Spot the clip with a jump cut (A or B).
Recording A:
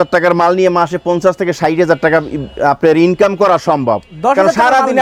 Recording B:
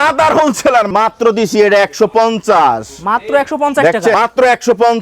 B